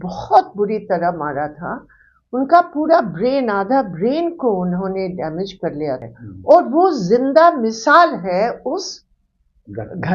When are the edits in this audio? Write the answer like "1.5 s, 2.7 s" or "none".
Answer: 6.0 s